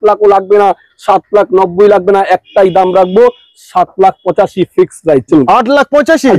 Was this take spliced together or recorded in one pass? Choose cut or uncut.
cut